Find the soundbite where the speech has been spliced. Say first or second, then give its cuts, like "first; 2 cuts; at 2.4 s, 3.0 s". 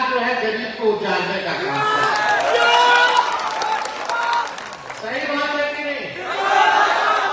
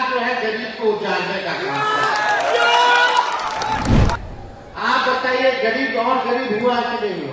second; 1 cut; at 4.2 s